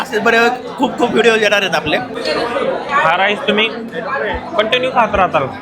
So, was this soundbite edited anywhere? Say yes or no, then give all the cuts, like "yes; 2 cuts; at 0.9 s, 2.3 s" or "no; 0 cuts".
yes; 1 cut; at 2.1 s